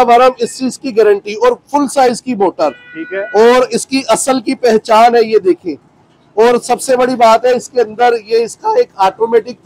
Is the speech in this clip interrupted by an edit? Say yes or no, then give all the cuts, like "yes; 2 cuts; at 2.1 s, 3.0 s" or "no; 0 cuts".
no; 0 cuts